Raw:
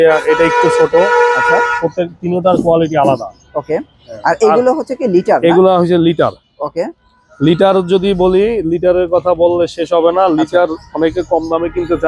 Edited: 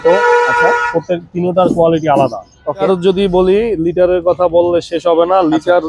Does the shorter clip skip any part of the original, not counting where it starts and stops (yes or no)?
yes